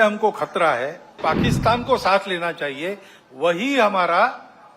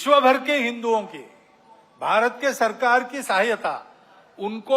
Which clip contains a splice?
first; 1 cut; at 1.2 s

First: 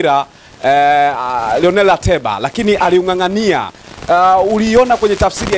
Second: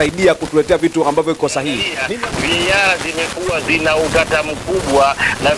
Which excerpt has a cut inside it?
second; 1 cut; at 1.9 s

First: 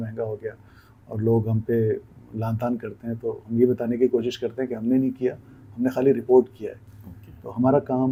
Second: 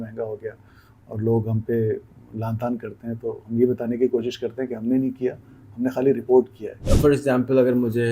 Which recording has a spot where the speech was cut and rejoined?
second; 1 cut; at 6.9 s

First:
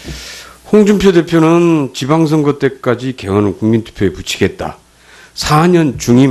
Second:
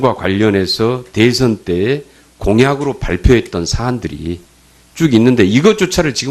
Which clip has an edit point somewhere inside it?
second; 1 cut; at 1.2 s

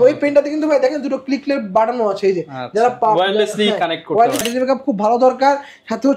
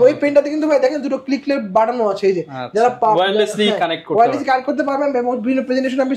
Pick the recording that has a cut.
first; 1 cut; at 4.4 s

